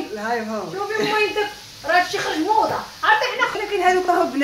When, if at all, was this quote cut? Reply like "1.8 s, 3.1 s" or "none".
3.5 s

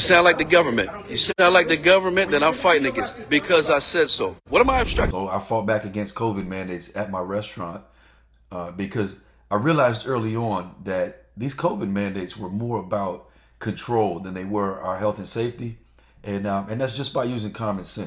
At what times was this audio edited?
5.1 s

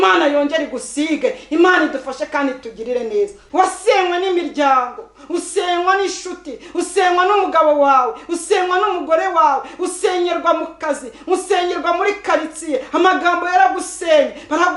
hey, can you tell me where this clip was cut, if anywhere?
3.4 s

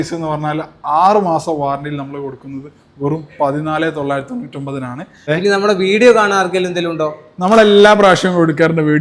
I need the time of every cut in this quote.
5.3 s

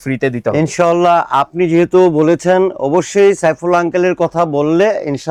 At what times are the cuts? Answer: none

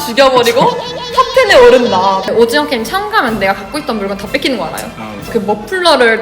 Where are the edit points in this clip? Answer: 2.3 s, 5.3 s

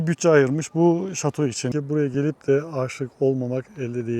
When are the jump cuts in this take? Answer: 1.7 s

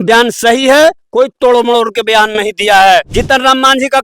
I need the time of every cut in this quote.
3.1 s

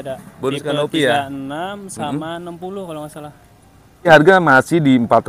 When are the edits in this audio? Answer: 4.1 s

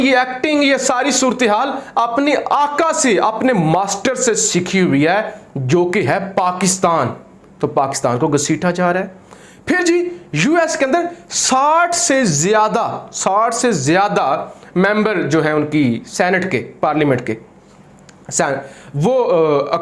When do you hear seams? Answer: none

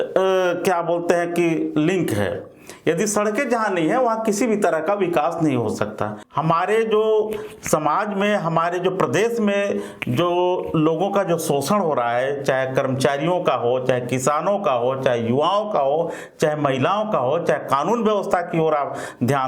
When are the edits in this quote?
6.2 s

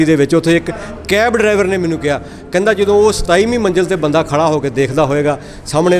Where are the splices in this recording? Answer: none

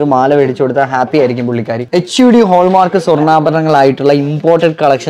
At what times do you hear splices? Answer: 1.8 s

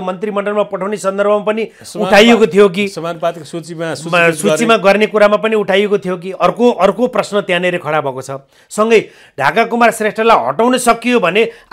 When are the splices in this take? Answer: none

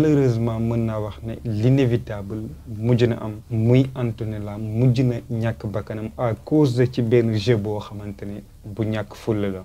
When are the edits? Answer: none

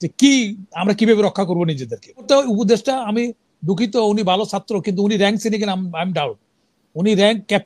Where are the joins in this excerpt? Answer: 2.2 s

